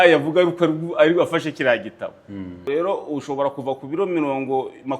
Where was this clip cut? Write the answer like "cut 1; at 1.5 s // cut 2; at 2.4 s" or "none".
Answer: cut 1; at 2.7 s